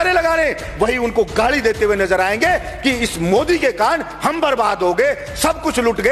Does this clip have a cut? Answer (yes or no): no